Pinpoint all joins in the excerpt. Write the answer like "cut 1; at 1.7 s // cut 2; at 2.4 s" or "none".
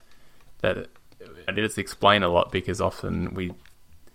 cut 1; at 1.5 s

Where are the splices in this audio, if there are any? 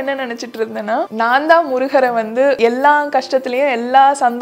cut 1; at 1.1 s // cut 2; at 2.6 s

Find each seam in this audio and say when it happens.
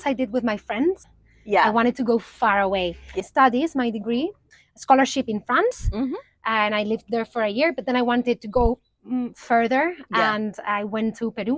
cut 1; at 1.1 s // cut 2; at 3.1 s // cut 3; at 4.5 s

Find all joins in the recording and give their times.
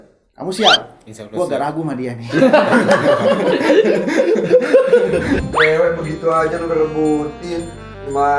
cut 1; at 5.4 s

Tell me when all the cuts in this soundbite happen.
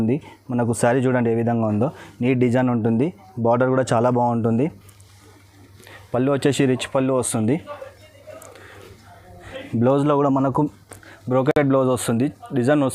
none

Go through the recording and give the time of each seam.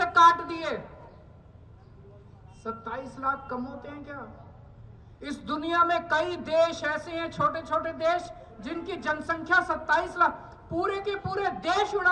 none

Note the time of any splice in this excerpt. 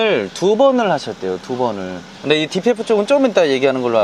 none

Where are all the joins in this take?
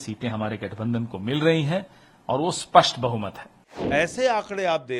cut 1; at 3.7 s

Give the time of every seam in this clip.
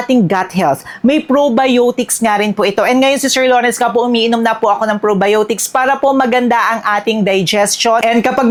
none

